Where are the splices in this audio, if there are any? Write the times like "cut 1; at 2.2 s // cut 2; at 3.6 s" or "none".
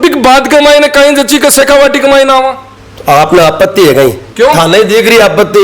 cut 1; at 4.2 s